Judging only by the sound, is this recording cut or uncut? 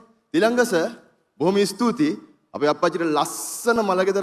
uncut